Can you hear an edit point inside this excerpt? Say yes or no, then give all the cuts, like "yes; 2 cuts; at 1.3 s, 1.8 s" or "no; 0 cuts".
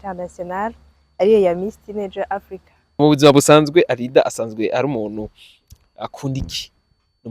yes; 1 cut; at 3.0 s